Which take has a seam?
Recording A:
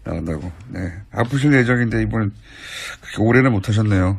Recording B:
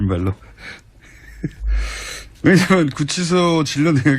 B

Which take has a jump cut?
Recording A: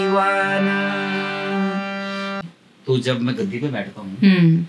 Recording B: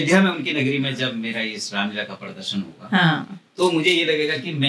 A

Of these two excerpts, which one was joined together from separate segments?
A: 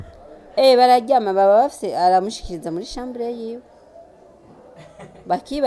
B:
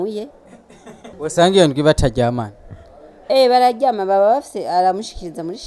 B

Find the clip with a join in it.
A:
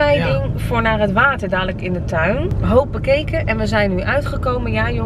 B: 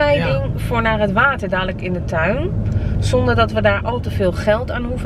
A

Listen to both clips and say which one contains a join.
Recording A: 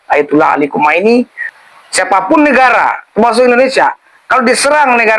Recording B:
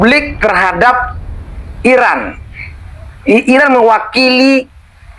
A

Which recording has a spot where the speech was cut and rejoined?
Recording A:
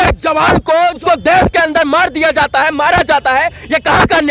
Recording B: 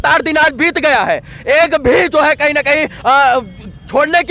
A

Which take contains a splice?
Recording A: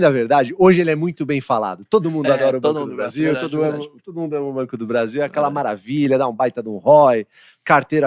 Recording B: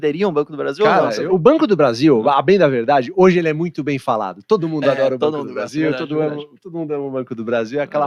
B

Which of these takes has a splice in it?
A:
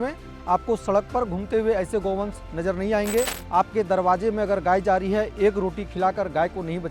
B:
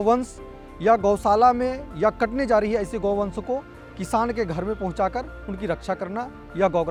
A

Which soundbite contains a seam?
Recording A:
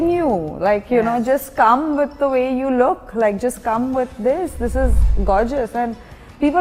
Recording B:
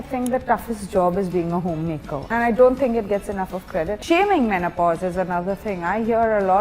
B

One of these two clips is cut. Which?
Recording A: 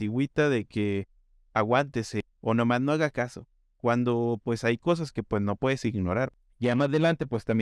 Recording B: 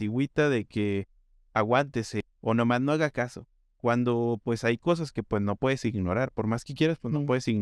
A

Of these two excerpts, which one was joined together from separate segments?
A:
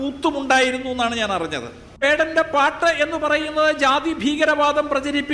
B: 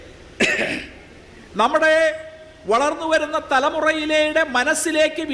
A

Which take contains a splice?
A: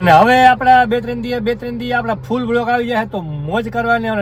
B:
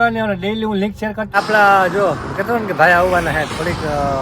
B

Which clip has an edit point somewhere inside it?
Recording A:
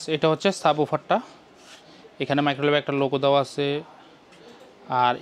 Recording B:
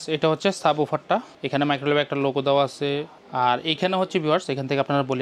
B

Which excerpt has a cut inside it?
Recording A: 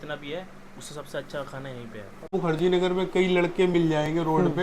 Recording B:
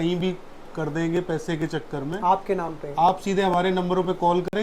A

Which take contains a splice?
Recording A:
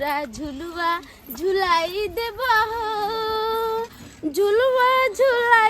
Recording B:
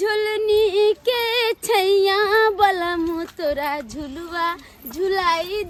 A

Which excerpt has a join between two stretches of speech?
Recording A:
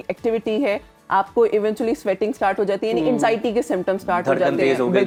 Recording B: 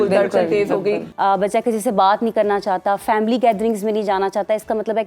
B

